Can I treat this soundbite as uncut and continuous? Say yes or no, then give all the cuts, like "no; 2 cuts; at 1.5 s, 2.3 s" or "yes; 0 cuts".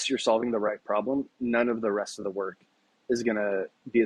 yes; 0 cuts